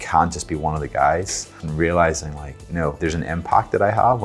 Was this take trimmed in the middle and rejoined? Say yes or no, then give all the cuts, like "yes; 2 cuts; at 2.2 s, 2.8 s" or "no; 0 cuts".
yes; 2 cuts; at 1.6 s, 3.0 s